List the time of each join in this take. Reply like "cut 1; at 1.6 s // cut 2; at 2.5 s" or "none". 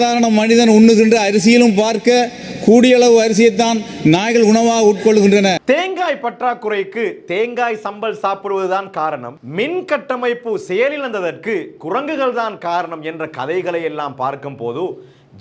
cut 1; at 5.6 s